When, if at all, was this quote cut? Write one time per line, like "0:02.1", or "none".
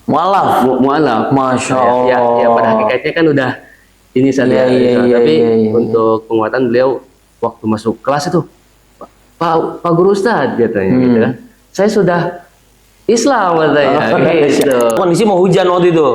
0:15.0